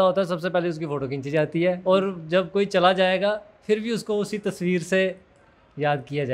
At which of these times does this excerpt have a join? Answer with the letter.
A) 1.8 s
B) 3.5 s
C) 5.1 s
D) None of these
A